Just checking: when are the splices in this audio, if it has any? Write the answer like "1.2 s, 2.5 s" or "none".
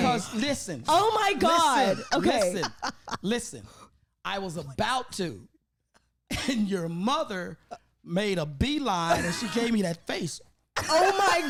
none